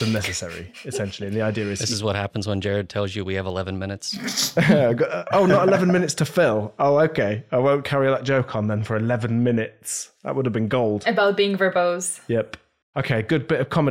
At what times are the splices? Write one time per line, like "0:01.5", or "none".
none